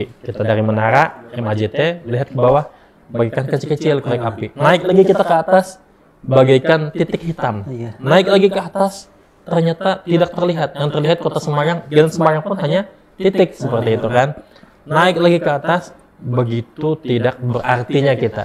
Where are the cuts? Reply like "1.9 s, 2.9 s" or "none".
none